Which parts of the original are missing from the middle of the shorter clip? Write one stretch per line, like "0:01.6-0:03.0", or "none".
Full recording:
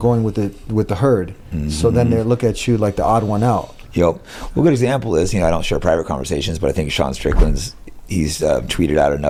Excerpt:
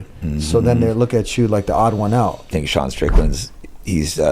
0:03.8-0:06.8